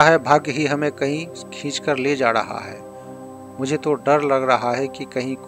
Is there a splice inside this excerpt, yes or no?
no